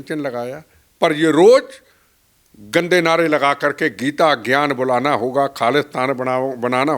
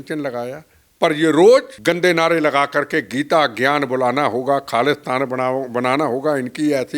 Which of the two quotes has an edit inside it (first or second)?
second